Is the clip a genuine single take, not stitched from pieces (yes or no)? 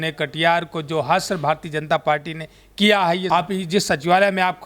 no